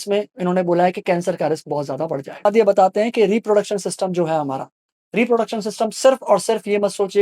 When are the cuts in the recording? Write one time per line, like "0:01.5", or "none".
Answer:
0:02.4